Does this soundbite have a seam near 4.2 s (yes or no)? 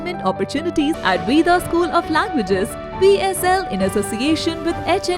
no